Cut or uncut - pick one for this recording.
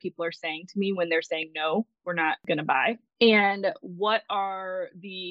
cut